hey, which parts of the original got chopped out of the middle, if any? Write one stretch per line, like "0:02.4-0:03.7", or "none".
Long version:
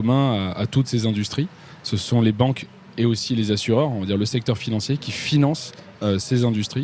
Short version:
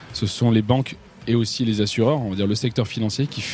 none